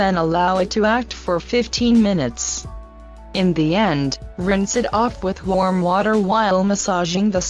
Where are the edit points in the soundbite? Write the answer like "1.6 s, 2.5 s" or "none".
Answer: 1.4 s